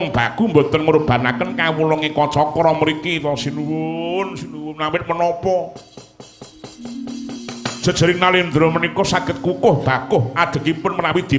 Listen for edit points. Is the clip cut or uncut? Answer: uncut